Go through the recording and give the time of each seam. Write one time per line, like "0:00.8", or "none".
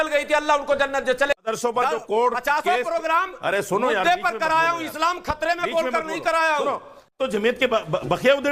0:01.4
0:07.1